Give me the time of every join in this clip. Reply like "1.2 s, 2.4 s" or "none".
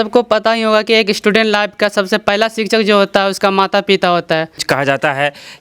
4.6 s